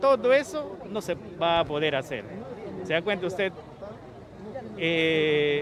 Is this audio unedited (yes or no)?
no